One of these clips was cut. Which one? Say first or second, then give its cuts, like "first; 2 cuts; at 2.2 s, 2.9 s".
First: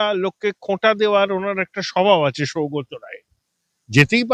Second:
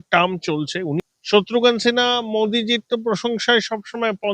second; 1 cut; at 1.0 s